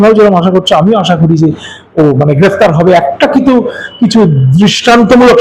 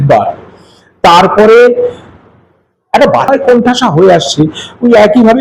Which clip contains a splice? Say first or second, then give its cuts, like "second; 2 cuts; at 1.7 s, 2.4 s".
second; 1 cut; at 3.3 s